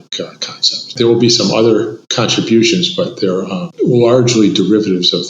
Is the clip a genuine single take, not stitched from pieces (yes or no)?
no